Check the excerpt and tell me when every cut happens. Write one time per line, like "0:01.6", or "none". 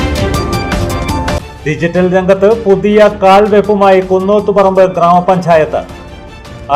0:01.1